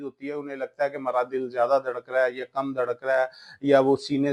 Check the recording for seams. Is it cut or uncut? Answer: uncut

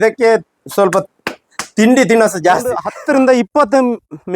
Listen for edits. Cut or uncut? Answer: cut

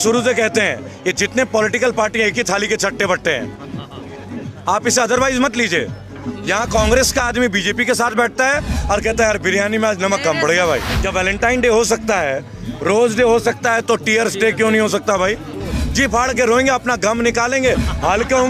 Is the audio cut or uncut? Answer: cut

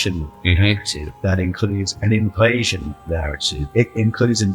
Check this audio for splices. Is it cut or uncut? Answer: cut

